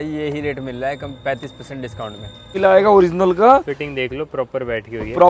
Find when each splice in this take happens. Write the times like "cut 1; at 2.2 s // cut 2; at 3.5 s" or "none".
cut 1; at 2.5 s